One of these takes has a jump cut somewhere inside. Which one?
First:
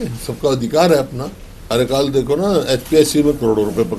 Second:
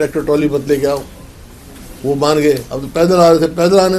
first; 1 cut; at 1.5 s

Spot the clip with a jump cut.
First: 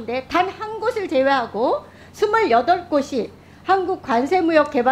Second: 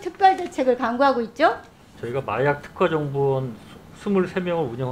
second; 1 cut; at 1.9 s

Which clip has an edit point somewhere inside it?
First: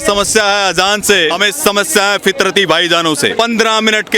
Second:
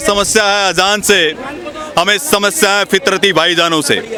first; 2 cuts; at 1.3 s, 3.3 s

